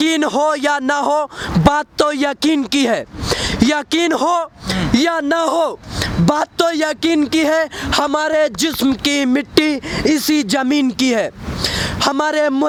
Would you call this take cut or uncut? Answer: uncut